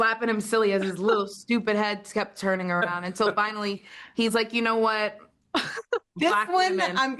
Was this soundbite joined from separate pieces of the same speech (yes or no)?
no